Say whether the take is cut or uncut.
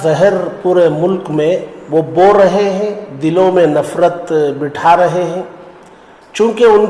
cut